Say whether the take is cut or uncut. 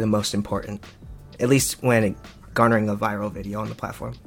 uncut